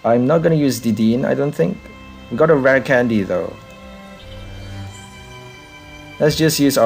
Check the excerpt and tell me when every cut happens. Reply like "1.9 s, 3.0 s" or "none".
none